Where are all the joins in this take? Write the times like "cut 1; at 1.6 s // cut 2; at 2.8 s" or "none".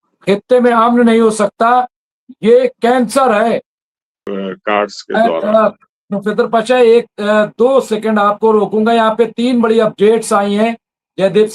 cut 1; at 4.3 s